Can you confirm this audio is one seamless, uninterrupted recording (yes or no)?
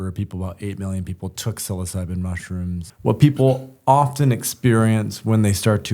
no